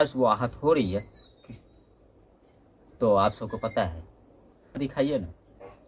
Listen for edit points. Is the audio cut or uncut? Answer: cut